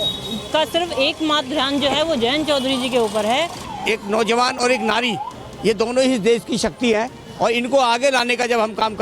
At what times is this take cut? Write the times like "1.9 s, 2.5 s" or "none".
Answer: 3.7 s

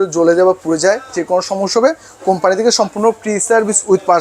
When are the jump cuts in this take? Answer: none

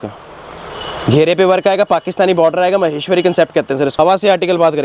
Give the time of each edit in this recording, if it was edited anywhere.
3.9 s

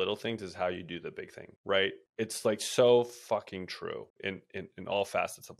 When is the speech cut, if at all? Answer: none

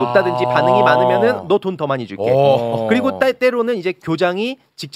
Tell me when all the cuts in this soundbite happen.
none

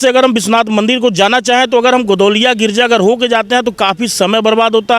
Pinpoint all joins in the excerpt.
none

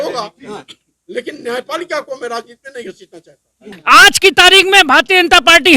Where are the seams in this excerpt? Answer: 3.7 s

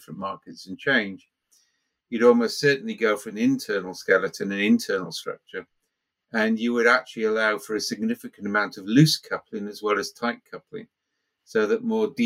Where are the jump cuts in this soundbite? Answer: none

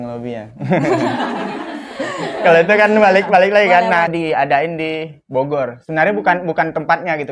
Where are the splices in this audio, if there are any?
4.1 s

